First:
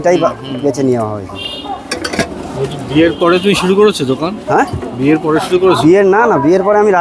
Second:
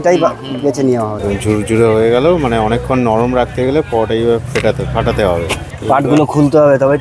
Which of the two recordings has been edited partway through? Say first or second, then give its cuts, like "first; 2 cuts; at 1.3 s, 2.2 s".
second; 2 cuts; at 1.2 s, 5.6 s